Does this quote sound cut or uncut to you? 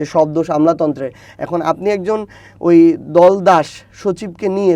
uncut